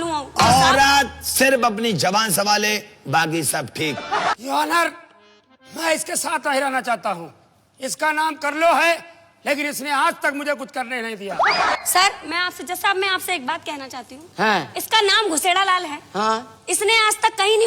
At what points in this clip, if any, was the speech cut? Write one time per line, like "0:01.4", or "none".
0:04.3
0:11.8